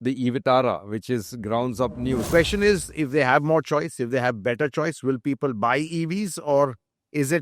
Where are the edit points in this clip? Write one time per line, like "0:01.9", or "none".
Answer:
0:02.3

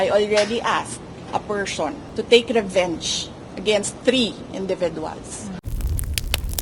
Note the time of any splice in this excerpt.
0:01.1
0:02.1
0:04.0
0:05.6

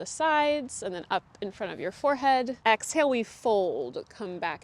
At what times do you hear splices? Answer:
0:02.5

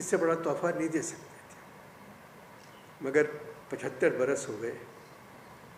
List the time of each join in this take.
none

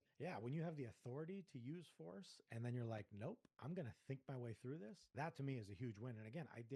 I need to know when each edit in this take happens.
0:05.0

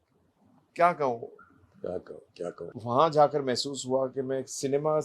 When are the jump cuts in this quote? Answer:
0:02.7

